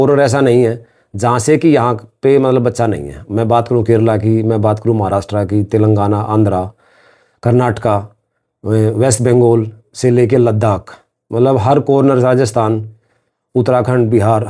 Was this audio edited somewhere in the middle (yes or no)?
no